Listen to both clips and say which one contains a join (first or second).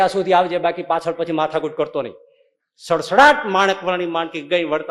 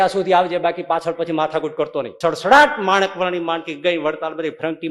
second